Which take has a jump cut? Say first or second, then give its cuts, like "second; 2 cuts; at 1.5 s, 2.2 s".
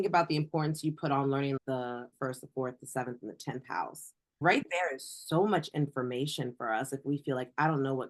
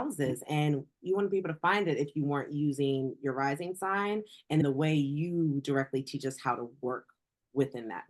first; 1 cut; at 1.6 s